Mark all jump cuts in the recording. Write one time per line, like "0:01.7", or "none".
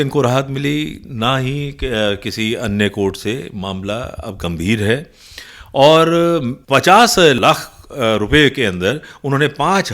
0:06.5
0:07.4